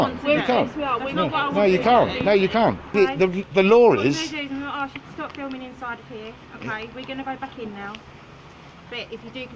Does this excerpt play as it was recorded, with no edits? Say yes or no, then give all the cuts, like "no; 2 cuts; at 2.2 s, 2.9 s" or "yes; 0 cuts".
no; 1 cut; at 2.9 s